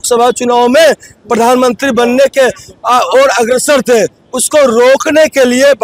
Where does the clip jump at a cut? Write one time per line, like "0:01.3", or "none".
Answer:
none

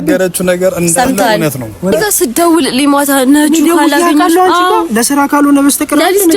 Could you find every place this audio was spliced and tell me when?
0:01.9

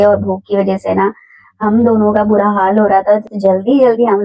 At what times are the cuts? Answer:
none

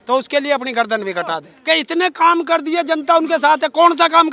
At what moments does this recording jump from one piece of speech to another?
0:01.5

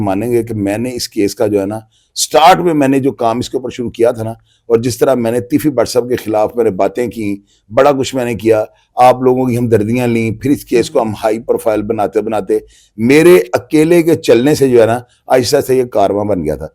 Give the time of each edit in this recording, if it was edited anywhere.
none

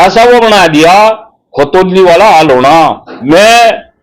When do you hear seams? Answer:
0:03.1

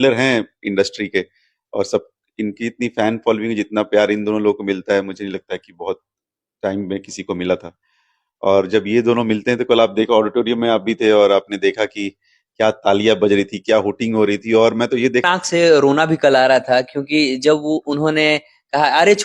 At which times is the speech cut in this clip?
0:15.2

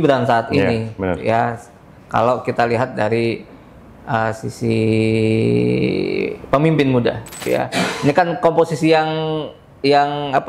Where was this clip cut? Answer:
0:07.3

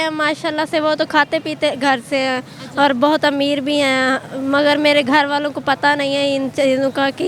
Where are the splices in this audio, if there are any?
none

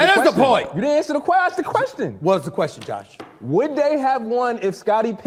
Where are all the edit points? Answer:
none

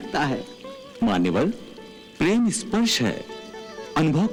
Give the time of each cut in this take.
none

